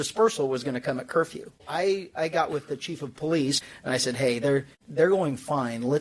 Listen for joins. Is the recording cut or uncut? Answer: cut